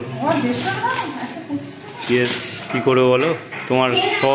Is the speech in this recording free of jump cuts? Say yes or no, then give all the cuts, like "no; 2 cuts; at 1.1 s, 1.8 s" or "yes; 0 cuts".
yes; 0 cuts